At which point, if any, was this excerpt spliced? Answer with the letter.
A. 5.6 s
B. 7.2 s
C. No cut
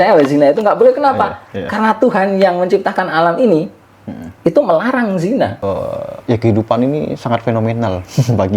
A